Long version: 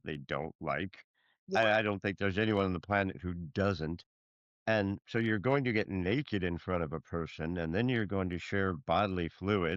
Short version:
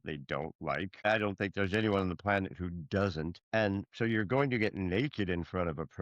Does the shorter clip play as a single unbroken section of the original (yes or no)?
no